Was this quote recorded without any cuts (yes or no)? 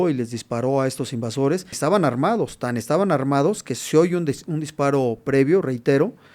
no